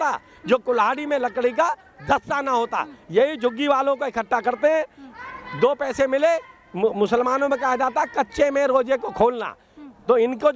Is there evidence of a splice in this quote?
no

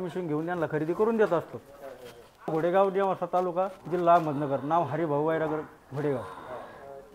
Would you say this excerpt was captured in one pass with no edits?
no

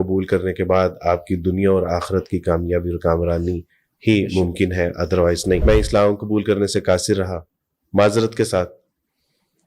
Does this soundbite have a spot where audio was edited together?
yes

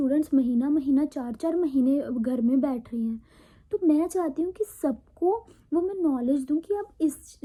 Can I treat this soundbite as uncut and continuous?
yes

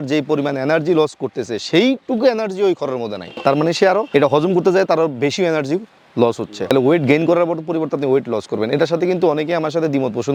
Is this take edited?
no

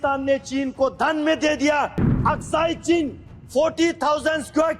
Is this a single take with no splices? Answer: no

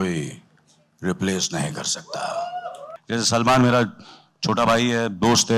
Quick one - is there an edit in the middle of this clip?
yes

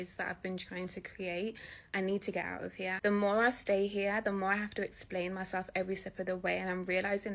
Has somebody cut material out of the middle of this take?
no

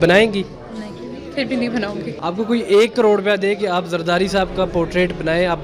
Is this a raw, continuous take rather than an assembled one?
no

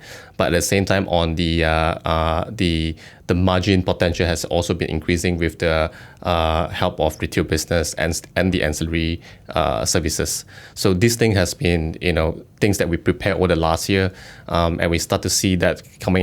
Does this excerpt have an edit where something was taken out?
no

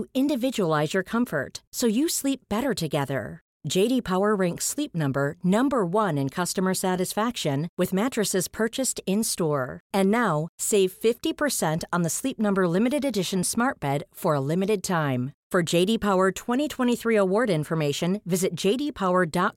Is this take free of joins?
yes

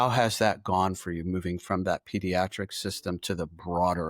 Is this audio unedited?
yes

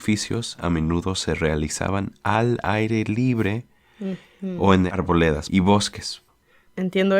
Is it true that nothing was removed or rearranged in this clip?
no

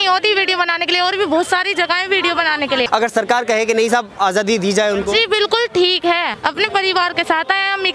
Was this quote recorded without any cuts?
no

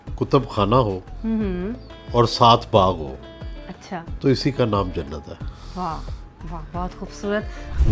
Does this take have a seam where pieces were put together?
no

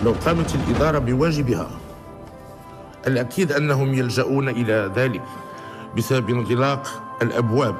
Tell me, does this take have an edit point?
no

